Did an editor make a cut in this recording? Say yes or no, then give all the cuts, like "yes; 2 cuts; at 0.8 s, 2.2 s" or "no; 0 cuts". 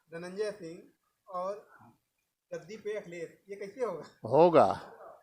no; 0 cuts